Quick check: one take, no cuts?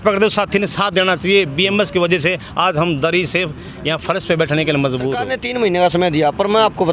no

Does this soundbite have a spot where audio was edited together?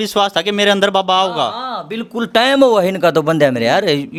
no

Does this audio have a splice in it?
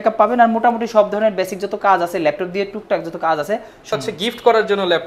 yes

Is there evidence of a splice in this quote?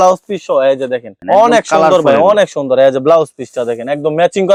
no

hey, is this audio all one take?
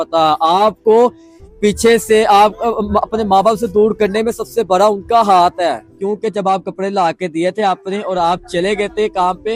no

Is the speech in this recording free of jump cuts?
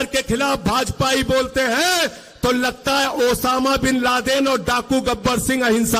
yes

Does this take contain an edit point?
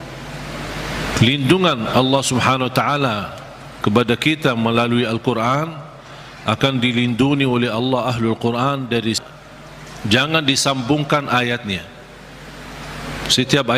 yes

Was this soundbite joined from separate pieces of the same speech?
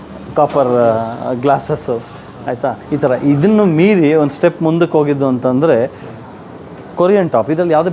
no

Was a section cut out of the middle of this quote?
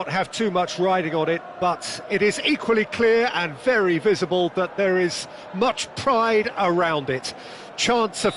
no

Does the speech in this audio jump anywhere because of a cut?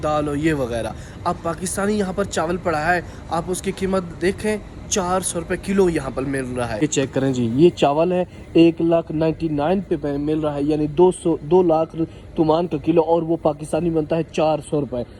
no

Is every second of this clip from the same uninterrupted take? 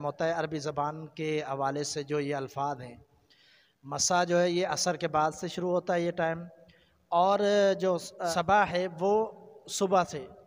no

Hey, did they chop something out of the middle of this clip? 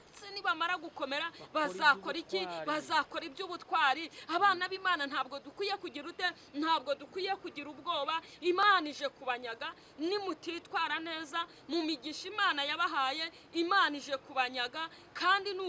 yes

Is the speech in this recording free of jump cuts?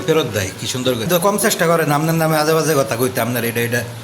no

